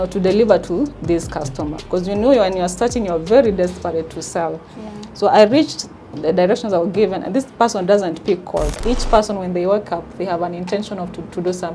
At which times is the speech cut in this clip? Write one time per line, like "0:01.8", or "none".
0:08.7